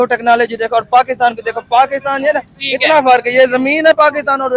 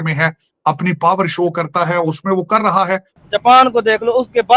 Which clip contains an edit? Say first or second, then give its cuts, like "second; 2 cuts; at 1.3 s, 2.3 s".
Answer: second; 1 cut; at 3.1 s